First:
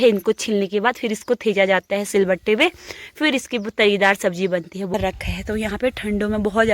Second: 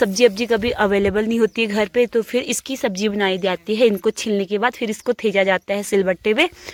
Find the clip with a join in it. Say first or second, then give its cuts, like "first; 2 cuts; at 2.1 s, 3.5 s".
first; 1 cut; at 4.9 s